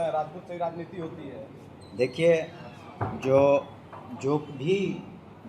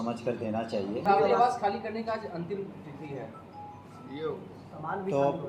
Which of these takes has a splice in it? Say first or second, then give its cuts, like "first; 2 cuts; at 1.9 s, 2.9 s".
second; 1 cut; at 1.0 s